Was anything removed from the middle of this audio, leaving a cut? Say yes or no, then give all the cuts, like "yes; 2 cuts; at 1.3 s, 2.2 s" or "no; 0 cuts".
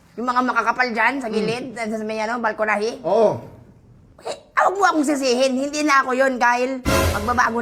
no; 0 cuts